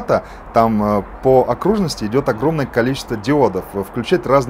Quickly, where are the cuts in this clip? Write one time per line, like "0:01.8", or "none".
none